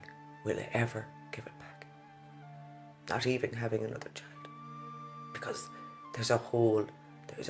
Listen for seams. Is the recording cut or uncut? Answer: uncut